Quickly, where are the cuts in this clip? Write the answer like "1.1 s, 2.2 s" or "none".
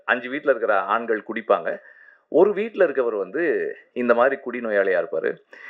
none